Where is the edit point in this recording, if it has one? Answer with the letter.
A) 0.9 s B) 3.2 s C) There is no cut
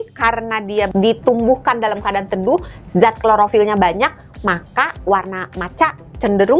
A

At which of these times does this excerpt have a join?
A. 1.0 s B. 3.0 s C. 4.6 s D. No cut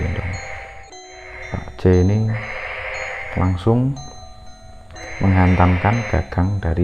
A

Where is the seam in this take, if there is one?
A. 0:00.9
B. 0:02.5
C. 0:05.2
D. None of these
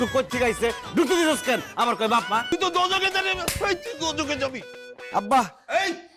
B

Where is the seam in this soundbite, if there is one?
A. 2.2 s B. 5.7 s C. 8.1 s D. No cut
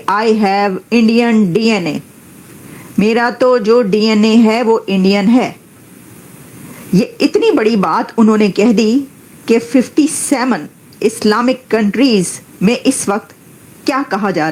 D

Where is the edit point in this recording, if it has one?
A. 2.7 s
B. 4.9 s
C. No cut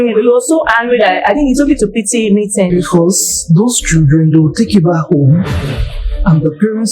A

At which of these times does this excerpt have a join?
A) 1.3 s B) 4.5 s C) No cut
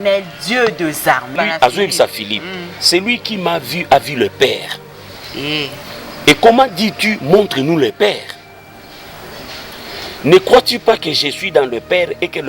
A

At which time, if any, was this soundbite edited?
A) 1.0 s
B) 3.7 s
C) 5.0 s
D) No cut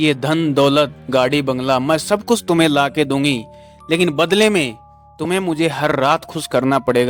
D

